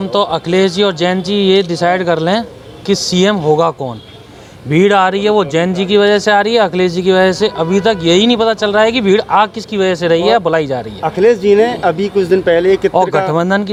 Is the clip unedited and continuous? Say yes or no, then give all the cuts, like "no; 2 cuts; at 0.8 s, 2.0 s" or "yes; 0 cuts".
yes; 0 cuts